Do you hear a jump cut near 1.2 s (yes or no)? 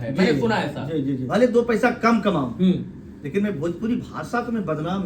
yes